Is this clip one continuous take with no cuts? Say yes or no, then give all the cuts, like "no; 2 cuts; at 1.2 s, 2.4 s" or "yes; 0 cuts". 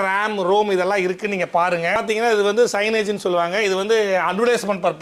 no; 1 cut; at 2.0 s